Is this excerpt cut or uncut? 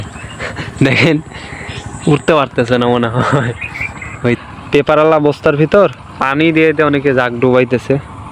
cut